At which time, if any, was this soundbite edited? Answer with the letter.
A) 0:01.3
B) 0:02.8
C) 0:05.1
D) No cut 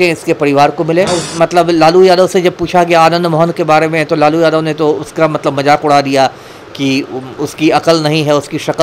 A